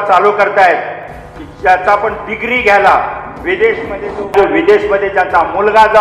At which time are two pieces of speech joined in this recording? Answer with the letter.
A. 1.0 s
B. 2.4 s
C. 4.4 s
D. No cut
C